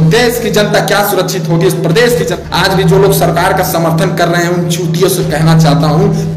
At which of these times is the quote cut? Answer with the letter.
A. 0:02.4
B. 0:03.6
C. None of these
A